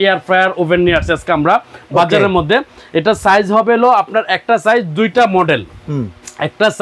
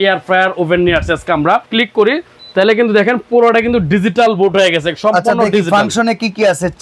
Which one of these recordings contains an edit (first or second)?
second